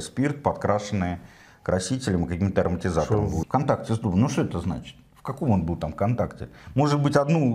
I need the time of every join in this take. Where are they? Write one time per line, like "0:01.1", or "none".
0:03.4